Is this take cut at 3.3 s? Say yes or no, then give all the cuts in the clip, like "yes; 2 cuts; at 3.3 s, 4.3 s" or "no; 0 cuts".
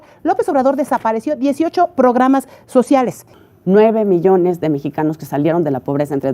yes; 1 cut; at 3.3 s